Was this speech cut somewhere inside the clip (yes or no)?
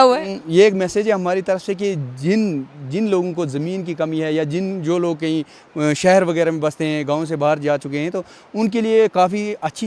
no